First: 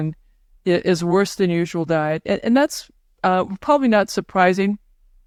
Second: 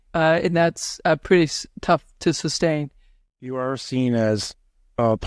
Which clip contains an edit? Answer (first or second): second